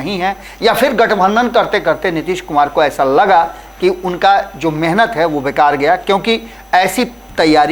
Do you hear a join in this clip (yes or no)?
no